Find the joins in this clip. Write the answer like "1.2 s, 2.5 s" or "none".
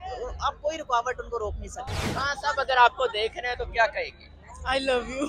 2.0 s

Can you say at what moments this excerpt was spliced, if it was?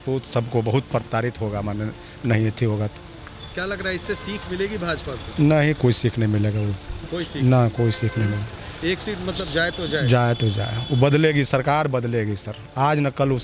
none

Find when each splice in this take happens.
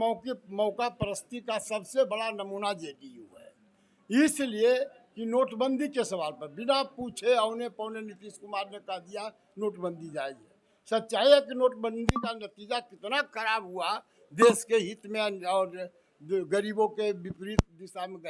none

